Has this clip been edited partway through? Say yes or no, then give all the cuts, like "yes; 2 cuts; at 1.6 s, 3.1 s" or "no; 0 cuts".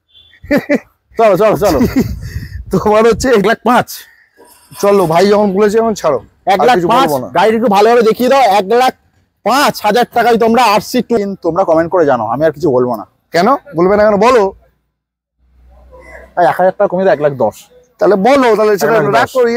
yes; 2 cuts; at 3.4 s, 11.2 s